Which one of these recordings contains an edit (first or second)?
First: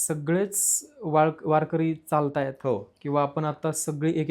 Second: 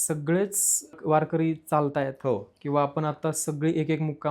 second